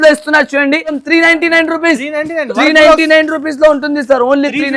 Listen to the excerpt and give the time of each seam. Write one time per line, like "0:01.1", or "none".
0:01.0